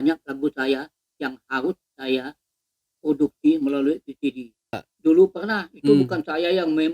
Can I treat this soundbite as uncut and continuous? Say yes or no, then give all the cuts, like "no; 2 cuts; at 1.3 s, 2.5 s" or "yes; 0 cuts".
no; 1 cut; at 4.9 s